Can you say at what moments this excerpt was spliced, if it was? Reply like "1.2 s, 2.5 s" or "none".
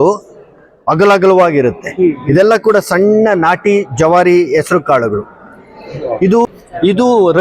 6.5 s